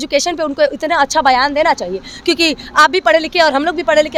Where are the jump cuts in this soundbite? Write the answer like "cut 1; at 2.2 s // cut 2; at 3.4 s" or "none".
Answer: none